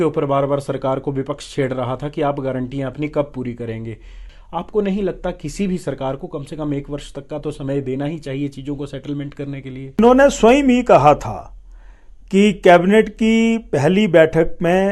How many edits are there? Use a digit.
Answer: 2